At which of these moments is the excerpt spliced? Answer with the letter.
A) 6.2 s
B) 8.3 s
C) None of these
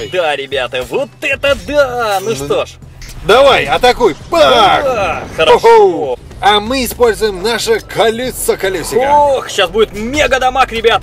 A